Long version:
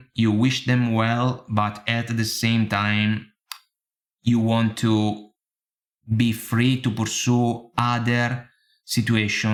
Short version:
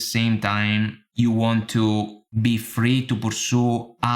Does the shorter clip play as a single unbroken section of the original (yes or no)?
no